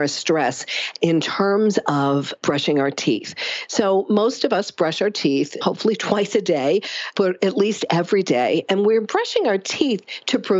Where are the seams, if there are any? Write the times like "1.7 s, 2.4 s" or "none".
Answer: none